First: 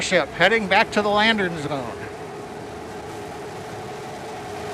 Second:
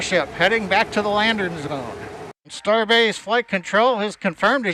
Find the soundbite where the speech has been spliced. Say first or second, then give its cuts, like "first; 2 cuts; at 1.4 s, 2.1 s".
second; 1 cut; at 2.5 s